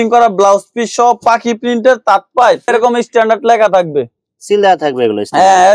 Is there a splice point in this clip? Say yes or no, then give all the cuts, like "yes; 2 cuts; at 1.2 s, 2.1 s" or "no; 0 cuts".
yes; 1 cut; at 2.7 s